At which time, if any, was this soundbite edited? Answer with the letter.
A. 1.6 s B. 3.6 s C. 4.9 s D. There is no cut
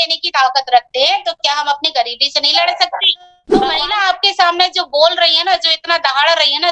B